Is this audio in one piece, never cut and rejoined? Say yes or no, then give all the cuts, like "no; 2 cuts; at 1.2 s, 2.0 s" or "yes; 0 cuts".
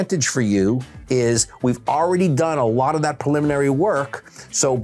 yes; 0 cuts